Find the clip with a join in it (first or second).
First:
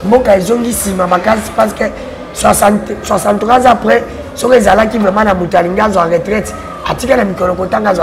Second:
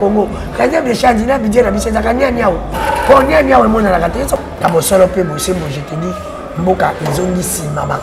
second